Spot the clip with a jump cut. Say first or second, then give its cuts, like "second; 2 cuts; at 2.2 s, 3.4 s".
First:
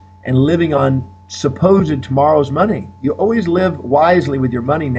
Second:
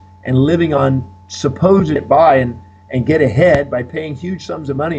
first; 1 cut; at 2.0 s